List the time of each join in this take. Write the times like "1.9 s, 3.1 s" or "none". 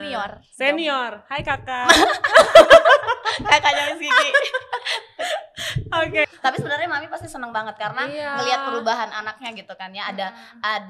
6.3 s